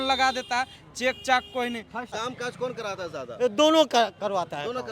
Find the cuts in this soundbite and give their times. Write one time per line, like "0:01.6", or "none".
0:02.1